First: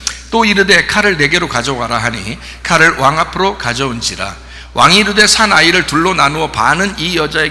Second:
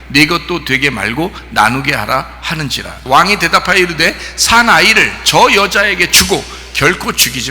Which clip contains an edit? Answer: second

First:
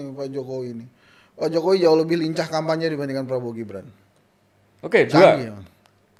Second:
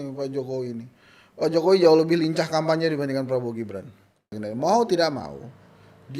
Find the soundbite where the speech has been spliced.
second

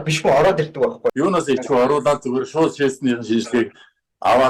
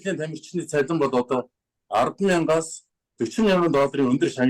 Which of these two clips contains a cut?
first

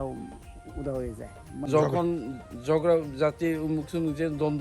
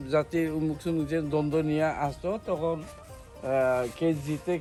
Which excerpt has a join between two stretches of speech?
first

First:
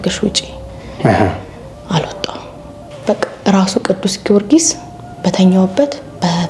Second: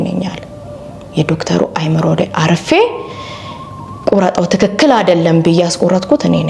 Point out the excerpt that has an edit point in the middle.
first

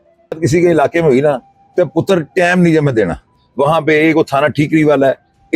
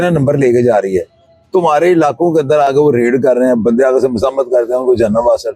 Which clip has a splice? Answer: first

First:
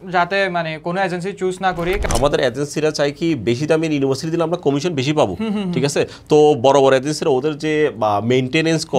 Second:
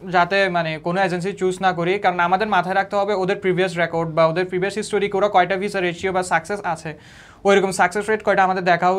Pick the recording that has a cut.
first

